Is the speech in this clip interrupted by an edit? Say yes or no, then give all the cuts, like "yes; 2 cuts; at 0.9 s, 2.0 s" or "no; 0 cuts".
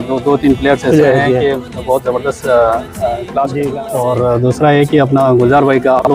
yes; 1 cut; at 3.8 s